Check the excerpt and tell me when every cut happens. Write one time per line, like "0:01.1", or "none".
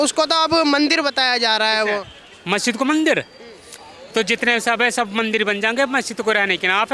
none